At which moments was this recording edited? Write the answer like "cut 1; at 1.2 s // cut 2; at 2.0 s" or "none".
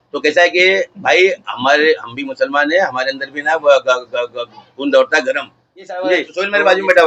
cut 1; at 6.1 s